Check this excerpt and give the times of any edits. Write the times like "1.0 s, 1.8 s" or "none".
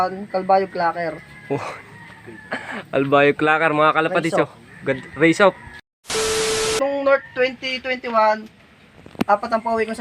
5.8 s, 6.8 s